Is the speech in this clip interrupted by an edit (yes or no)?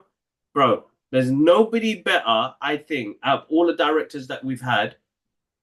no